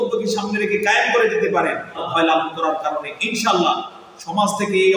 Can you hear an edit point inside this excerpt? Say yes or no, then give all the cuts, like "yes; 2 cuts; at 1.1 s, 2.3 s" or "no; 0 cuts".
yes; 1 cut; at 2.1 s